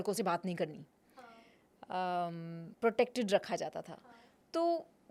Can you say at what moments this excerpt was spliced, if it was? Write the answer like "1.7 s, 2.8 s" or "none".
none

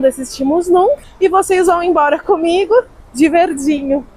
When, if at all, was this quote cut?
1.1 s, 3.0 s

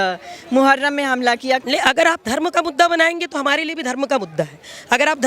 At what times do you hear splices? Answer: 1.6 s

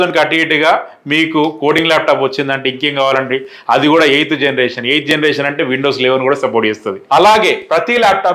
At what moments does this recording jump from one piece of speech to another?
7.0 s

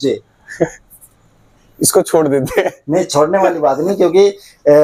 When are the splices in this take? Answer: none

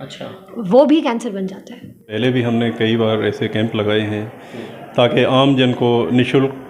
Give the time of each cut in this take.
2.1 s

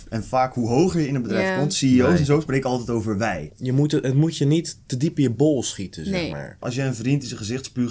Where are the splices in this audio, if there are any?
3.4 s, 6.6 s

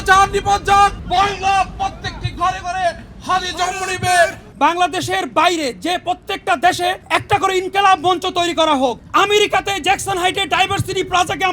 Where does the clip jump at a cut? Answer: 1.0 s, 4.4 s, 7.0 s, 9.0 s

